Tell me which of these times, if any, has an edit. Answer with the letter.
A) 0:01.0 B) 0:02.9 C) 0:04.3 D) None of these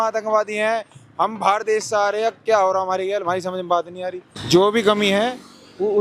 C